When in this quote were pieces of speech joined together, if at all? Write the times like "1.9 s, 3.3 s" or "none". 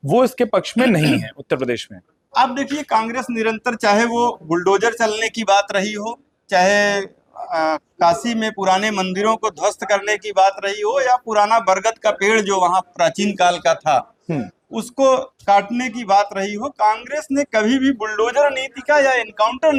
none

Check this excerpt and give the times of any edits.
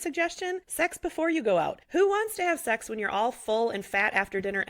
1.8 s

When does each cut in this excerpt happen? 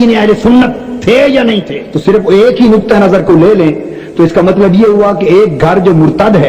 1.9 s

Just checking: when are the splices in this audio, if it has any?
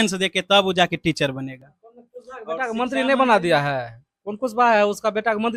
none

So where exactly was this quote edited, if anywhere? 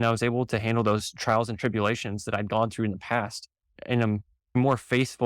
4.3 s

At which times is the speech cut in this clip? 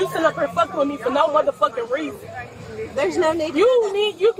none

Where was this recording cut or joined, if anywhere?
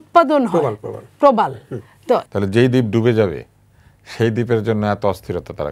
2.2 s

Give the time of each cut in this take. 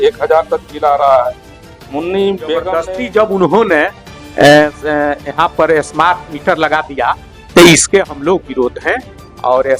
2.6 s

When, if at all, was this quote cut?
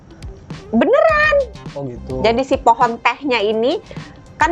none

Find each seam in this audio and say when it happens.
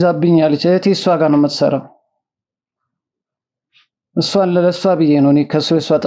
none

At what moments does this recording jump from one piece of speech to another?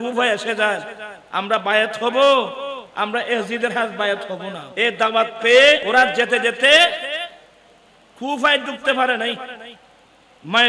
4.6 s, 5.8 s

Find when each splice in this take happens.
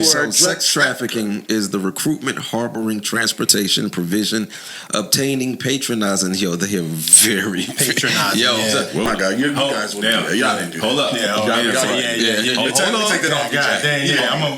9.1 s

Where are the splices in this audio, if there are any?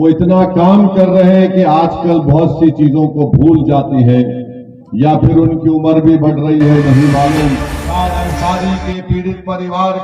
7.8 s

